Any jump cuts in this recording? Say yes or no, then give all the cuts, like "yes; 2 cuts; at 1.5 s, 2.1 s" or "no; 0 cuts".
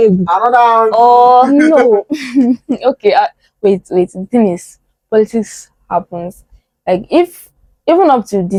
no; 0 cuts